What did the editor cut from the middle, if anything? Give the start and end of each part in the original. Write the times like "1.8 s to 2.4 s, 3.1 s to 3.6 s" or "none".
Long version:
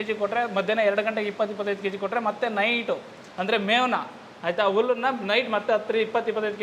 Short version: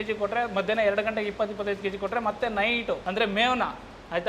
3.0 s to 3.4 s